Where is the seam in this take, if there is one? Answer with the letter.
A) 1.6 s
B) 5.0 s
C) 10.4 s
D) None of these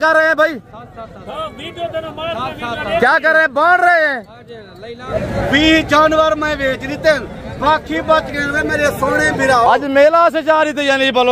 B